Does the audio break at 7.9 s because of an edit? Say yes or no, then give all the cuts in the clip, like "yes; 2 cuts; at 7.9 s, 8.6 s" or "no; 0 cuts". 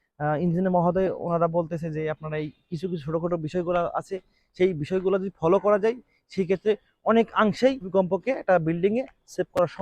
yes; 1 cut; at 7.9 s